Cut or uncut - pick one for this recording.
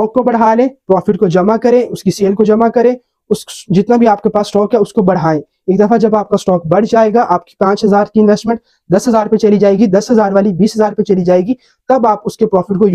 uncut